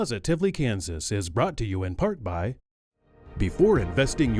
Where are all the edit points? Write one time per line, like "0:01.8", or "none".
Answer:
0:02.7